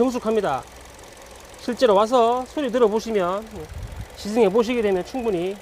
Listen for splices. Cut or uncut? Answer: uncut